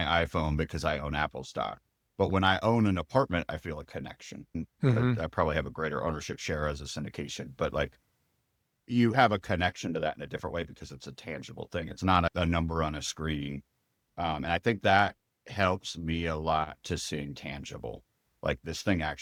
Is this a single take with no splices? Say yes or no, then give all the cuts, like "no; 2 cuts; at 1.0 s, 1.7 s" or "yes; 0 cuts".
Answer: yes; 0 cuts